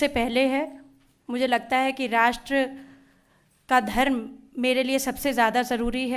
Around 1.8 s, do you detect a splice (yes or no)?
no